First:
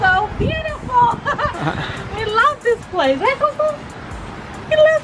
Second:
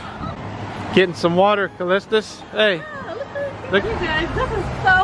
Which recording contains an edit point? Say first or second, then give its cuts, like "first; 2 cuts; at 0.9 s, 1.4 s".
second; 1 cut; at 3.8 s